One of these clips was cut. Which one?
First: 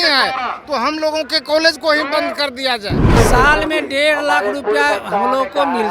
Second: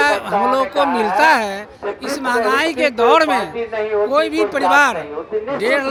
first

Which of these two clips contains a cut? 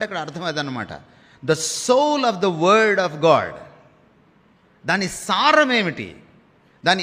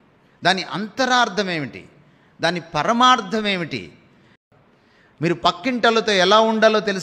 second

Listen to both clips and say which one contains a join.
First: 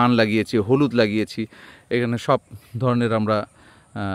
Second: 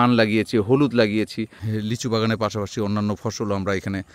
second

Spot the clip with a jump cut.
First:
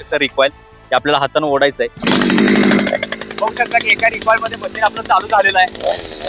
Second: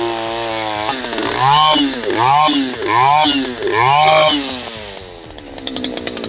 second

